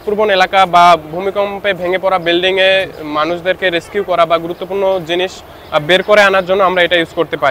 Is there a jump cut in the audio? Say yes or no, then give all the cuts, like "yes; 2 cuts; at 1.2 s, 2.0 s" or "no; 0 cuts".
no; 0 cuts